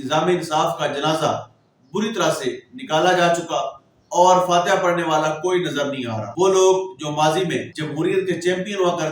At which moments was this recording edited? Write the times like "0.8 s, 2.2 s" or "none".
6.2 s, 7.8 s